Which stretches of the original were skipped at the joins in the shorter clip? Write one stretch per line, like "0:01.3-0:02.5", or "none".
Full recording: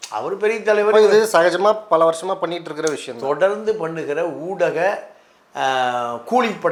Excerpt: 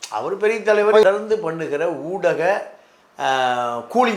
0:01.0-0:03.4